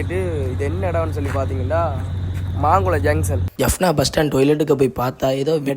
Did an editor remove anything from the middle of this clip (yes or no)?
yes